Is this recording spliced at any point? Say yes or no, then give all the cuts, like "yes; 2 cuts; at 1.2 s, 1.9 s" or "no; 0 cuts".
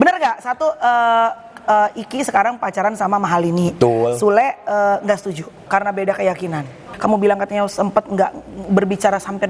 yes; 2 cuts; at 5.6 s, 6.9 s